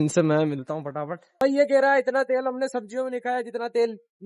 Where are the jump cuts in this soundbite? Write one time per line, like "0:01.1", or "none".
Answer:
0:01.4